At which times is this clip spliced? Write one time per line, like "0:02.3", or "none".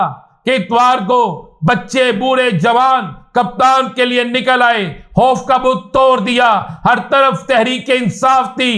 none